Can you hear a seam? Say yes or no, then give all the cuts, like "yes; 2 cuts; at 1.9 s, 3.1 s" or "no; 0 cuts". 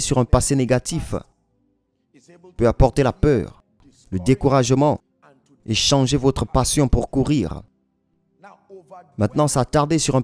no; 0 cuts